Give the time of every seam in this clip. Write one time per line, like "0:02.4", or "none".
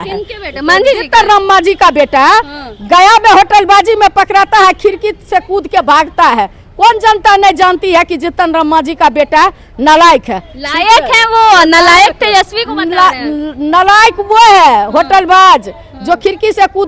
none